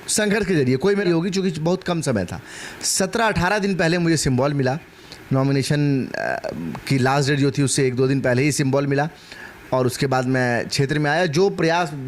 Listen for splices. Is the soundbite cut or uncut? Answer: cut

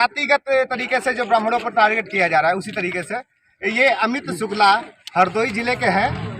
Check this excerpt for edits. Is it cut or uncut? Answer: uncut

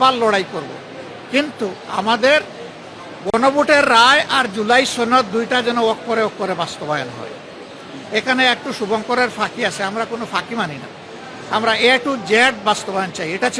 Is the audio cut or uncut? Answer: uncut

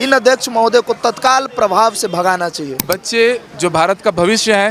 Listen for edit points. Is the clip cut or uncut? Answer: cut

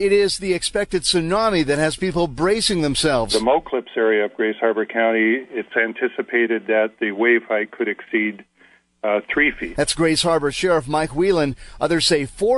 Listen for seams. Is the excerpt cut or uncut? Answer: uncut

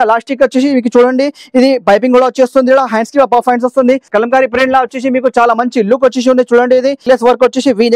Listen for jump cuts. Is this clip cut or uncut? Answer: cut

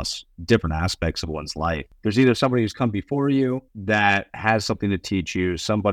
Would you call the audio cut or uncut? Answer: cut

